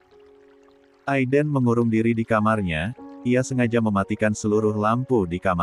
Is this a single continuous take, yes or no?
no